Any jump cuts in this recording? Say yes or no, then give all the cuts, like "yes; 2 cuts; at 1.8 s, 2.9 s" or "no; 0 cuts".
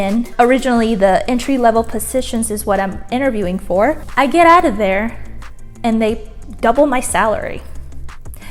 no; 0 cuts